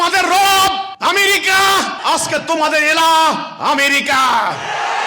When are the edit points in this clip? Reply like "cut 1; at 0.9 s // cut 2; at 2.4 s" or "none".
cut 1; at 0.9 s // cut 2; at 2.0 s